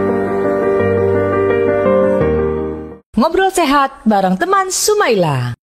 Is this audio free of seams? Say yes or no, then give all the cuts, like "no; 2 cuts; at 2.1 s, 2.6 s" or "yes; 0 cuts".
yes; 0 cuts